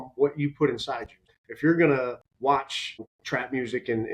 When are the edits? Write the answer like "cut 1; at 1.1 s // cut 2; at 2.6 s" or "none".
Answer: cut 1; at 1.3 s // cut 2; at 2.7 s